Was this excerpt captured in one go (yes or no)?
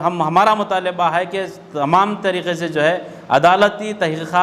yes